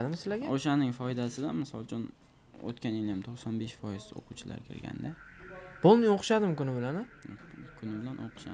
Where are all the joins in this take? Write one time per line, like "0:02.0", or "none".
none